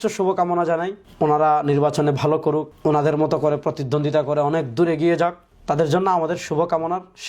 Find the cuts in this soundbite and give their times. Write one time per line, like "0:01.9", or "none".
0:01.0
0:02.7
0:05.5